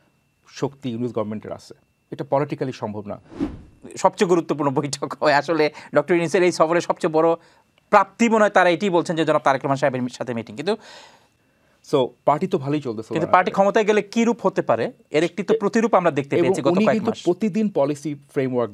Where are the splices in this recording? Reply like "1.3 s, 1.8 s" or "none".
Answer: 3.4 s, 11.3 s